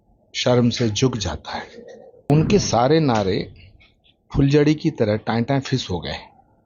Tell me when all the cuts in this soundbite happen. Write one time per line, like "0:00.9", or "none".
0:02.3

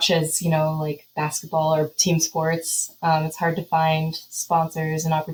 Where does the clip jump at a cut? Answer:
none

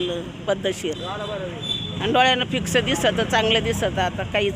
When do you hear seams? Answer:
0:01.7

